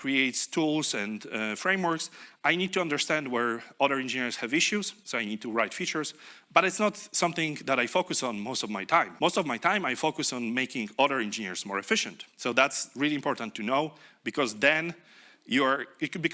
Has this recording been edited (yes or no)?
yes